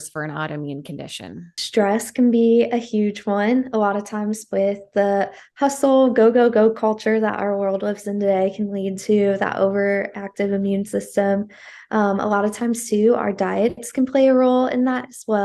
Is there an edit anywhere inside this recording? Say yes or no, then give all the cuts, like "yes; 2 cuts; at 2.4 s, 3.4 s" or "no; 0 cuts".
yes; 1 cut; at 1.5 s